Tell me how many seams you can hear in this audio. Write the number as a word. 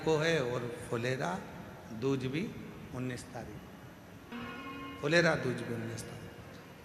one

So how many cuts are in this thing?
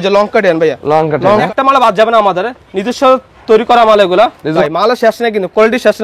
two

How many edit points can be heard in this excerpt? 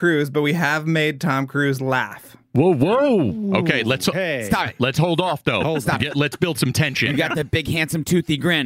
one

